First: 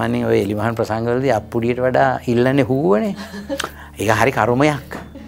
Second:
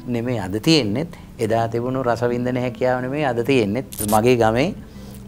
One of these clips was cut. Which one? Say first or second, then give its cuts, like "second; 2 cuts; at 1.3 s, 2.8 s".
second; 1 cut; at 4.0 s